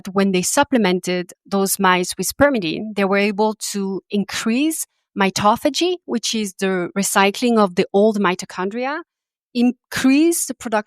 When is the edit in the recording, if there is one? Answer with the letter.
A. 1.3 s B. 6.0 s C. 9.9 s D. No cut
A